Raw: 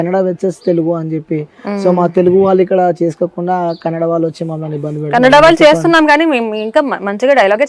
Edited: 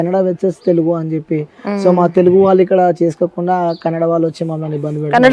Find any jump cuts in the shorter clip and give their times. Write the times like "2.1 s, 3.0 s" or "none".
none